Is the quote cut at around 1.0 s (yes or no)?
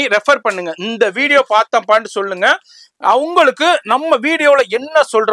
no